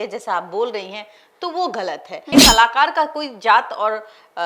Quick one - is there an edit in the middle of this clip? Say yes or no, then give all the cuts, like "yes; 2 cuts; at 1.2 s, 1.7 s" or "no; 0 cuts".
yes; 1 cut; at 2.3 s